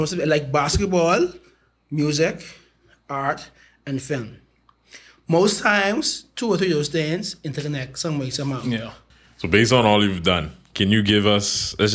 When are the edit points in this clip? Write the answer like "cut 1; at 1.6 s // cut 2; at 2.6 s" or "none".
cut 1; at 9.0 s